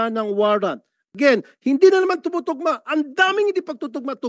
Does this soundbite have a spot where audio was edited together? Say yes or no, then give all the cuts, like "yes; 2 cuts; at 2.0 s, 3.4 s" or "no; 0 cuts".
yes; 1 cut; at 1.0 s